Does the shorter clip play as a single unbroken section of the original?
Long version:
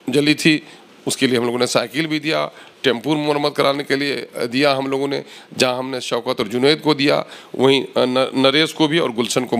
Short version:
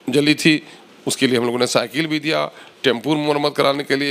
yes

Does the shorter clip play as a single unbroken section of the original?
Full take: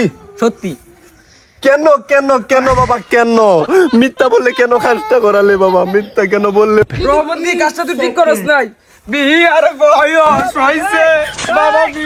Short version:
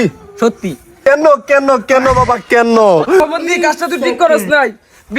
no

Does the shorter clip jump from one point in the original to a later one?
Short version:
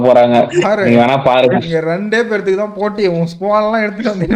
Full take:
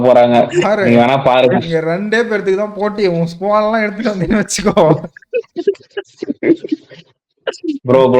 no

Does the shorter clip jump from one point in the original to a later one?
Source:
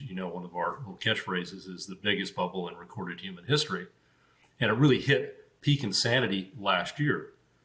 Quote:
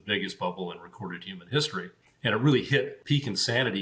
yes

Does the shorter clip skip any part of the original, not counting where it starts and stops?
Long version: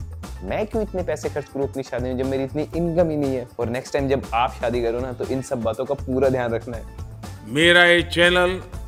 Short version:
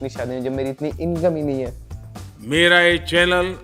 yes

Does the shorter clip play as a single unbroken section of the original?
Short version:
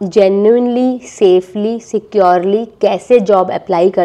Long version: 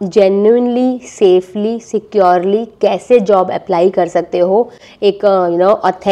yes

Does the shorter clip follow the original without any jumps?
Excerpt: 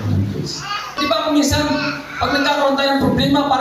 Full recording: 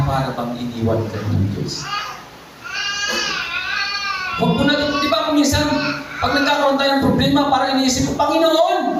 no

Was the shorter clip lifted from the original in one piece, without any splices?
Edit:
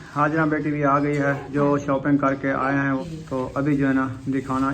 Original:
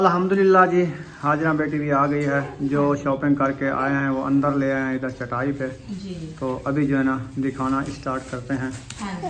no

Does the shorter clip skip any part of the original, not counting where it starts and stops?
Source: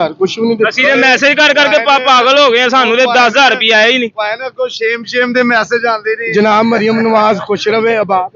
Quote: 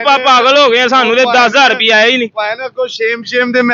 no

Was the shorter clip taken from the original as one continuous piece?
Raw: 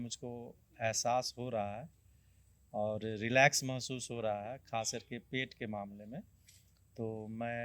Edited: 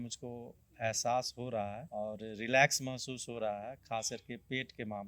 no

